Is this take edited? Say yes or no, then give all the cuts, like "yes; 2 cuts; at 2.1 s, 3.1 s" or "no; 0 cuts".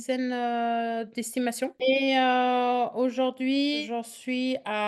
yes; 2 cuts; at 1.8 s, 3.8 s